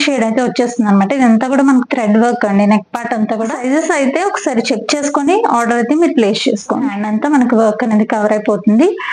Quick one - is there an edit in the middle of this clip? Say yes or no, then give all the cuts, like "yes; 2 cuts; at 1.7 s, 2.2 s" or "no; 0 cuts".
yes; 2 cuts; at 3.5 s, 7.0 s